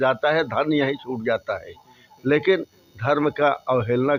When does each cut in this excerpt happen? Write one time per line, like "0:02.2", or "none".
none